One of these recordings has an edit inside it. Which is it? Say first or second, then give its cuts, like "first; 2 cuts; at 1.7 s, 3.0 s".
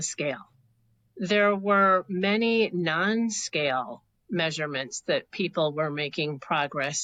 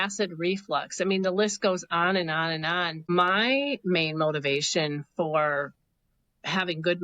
second; 1 cut; at 3.1 s